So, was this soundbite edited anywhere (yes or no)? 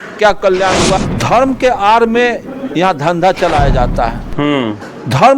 yes